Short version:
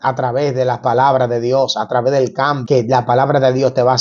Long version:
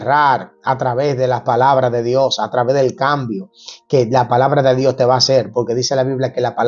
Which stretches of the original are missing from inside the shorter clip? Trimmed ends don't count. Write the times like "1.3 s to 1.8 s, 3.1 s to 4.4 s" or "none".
3.2 s to 3.8 s